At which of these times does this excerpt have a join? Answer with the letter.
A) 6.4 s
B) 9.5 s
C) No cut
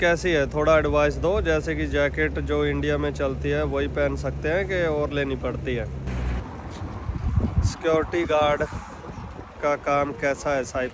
A